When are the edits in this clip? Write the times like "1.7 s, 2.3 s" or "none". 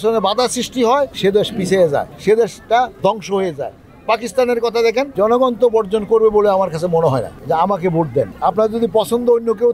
1.1 s, 2.1 s, 5.1 s, 7.3 s, 8.3 s